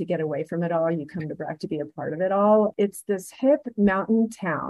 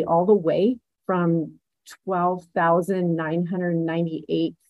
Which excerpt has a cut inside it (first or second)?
first